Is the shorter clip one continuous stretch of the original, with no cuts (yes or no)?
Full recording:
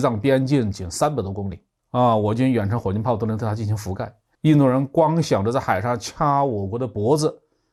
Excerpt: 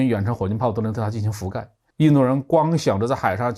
yes